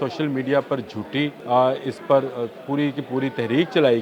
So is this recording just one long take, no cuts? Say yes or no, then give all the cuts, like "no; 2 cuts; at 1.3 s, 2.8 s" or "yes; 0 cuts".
no; 1 cut; at 1.4 s